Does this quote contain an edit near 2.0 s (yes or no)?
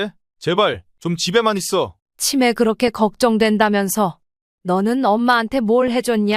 yes